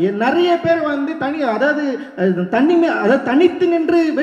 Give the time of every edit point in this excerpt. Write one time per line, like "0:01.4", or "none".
none

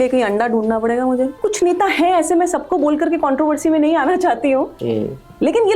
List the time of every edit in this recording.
0:01.4

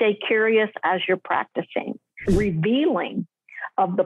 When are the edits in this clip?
0:02.0

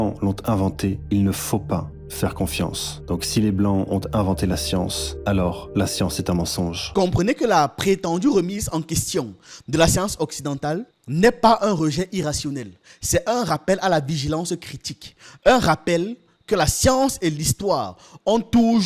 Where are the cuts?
0:06.9

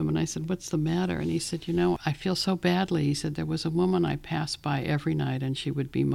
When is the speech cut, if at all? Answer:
0:02.0

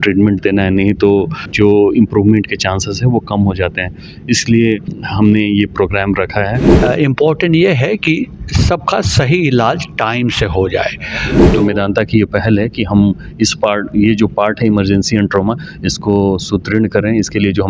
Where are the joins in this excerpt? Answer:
0:01.5
0:05.0
0:06.7
0:11.4

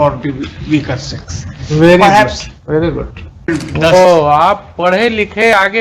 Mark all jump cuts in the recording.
0:03.5

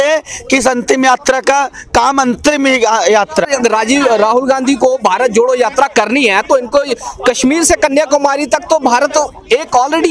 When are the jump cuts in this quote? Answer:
0:03.5

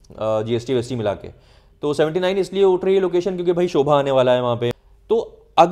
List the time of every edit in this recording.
0:04.7

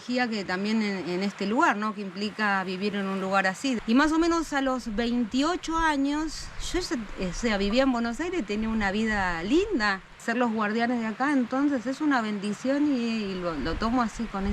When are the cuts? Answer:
0:03.8
0:10.2

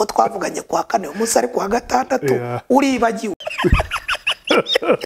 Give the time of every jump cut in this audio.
0:03.4

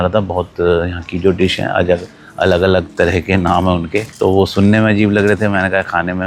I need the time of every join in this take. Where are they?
none

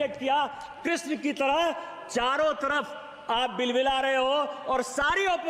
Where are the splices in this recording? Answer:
none

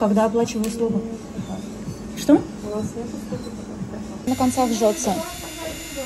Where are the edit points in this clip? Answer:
0:04.3

